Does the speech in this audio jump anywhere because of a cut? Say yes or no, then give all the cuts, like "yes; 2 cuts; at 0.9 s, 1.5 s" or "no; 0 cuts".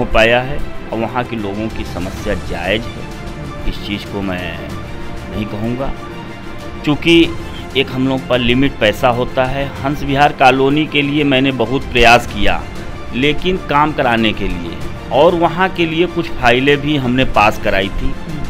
no; 0 cuts